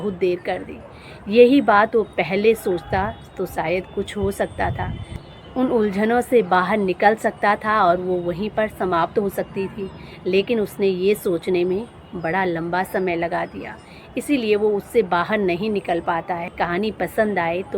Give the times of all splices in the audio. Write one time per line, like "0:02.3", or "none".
0:16.5